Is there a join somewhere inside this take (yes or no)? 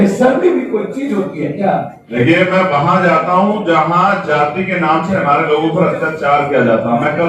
yes